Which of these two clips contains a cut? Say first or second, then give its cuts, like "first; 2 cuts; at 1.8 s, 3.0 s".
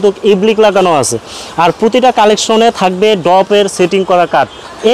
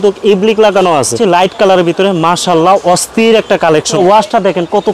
second; 2 cuts; at 1.2 s, 3.9 s